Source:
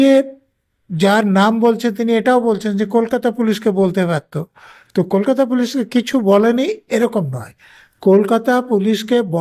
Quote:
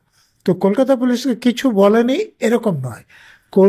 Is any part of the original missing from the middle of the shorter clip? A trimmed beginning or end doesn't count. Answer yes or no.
no